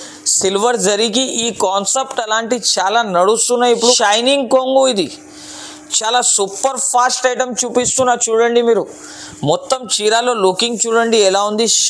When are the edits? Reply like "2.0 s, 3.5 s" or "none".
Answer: 4.0 s